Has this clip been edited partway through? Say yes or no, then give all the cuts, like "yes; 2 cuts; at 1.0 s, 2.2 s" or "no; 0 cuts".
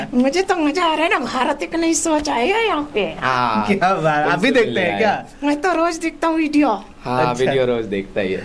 no; 0 cuts